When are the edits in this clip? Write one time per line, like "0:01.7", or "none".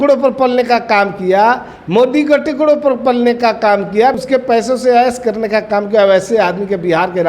0:04.2